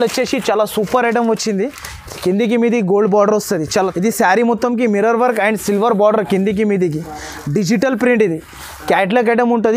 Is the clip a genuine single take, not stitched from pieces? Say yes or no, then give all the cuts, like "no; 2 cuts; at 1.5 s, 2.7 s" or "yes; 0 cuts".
no; 1 cut; at 3.7 s